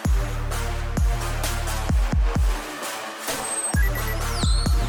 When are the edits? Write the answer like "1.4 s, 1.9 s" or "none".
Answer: none